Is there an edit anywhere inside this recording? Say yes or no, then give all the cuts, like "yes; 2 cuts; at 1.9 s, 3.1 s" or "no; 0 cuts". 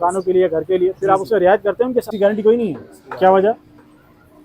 yes; 1 cut; at 2.1 s